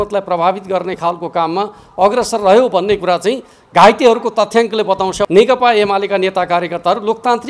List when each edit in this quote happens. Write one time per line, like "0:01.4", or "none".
0:05.3